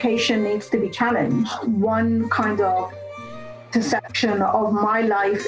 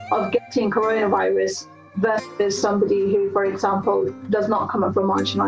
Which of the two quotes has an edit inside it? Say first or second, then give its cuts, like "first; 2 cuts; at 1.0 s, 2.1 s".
first; 1 cut; at 1.6 s